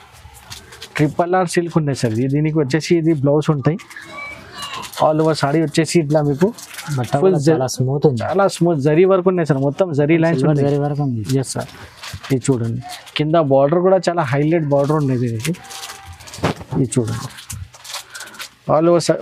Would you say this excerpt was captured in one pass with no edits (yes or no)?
yes